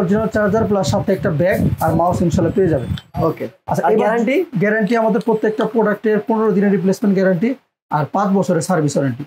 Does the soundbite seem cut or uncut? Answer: uncut